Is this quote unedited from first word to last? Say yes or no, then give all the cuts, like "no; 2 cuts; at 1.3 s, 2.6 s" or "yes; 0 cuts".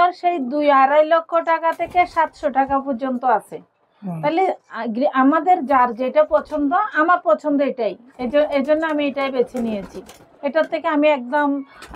yes; 0 cuts